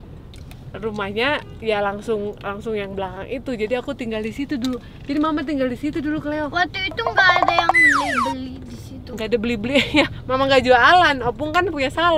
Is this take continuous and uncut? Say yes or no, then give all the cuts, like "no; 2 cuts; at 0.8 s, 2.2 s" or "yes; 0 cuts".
yes; 0 cuts